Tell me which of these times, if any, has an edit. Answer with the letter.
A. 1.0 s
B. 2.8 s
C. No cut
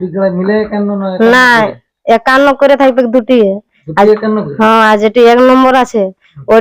C